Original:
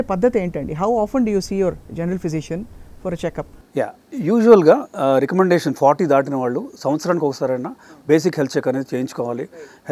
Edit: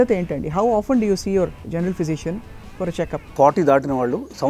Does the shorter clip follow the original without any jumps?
no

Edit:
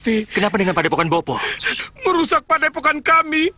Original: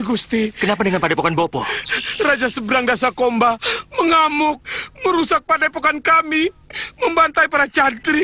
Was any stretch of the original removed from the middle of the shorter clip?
yes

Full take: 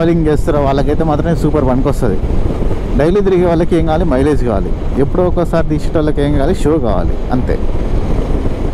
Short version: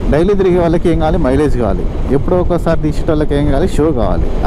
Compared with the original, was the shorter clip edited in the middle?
no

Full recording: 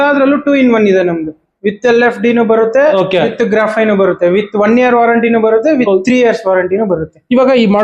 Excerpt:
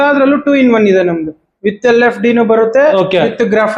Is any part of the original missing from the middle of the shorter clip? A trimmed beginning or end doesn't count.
no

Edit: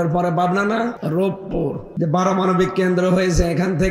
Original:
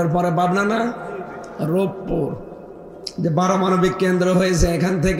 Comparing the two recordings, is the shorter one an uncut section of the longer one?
no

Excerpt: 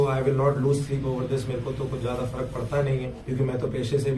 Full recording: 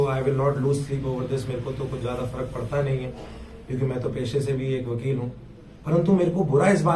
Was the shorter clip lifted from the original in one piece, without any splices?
no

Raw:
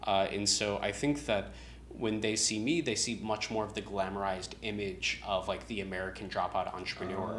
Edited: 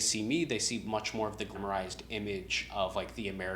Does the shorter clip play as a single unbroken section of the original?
no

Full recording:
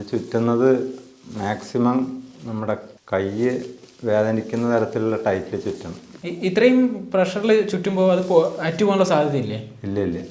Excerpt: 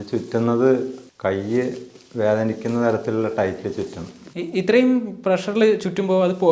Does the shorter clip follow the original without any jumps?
no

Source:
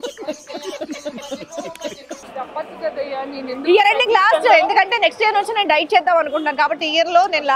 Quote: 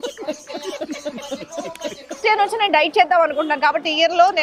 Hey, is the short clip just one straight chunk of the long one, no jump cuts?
no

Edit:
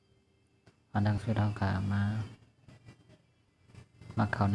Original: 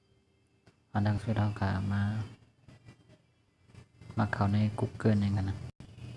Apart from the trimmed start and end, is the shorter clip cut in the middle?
no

